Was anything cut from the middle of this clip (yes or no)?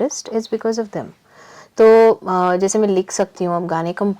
no